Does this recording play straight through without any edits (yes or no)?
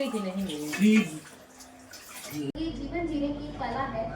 no